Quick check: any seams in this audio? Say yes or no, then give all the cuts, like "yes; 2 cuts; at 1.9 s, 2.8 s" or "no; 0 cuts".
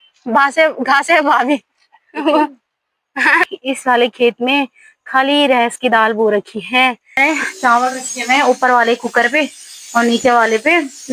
yes; 2 cuts; at 3.4 s, 7.1 s